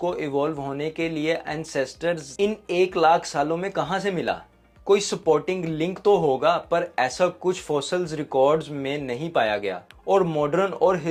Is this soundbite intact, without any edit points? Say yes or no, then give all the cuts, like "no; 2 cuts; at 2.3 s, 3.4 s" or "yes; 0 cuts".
yes; 0 cuts